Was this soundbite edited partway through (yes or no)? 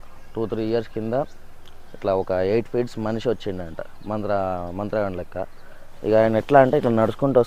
no